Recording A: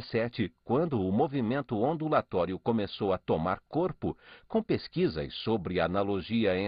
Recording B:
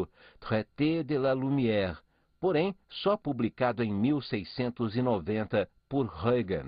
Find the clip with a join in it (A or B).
A